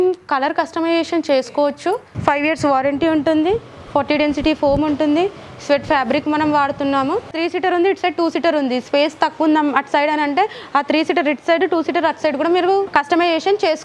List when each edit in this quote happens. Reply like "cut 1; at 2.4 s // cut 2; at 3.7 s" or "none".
cut 1; at 2.1 s // cut 2; at 7.3 s // cut 3; at 12.9 s